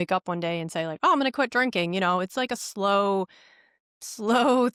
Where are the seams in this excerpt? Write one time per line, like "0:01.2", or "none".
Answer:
none